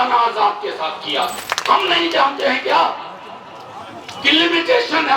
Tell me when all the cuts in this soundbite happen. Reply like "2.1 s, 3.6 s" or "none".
1.3 s